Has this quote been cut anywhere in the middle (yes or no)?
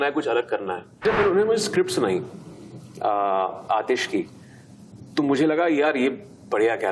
yes